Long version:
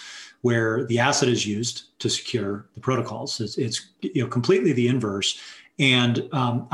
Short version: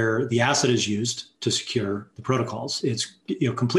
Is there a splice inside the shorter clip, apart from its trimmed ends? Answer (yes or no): yes